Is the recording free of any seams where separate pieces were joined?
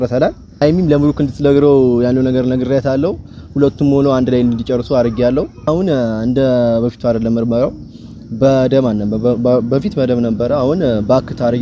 yes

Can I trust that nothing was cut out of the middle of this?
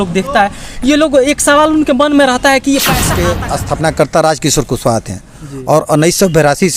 no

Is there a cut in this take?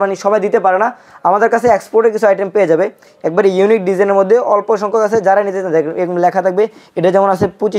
no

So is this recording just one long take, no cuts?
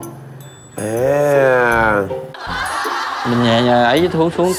yes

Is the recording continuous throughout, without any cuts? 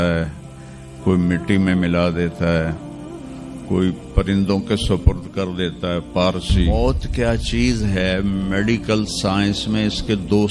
no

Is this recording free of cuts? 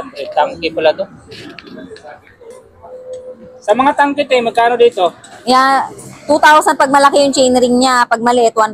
no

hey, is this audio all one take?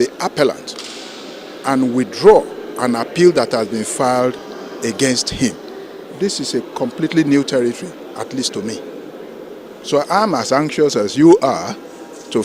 yes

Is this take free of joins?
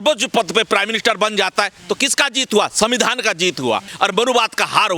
no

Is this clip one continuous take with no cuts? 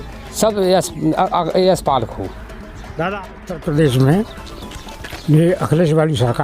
no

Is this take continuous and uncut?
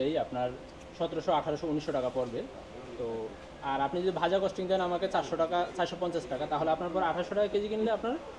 yes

